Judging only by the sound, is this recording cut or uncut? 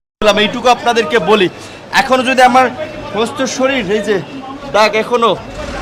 uncut